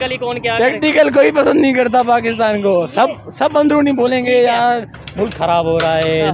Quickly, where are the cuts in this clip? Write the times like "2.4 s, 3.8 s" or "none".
none